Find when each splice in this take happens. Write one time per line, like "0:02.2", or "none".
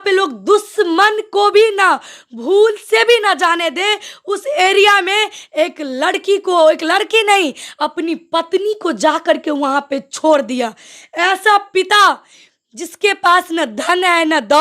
none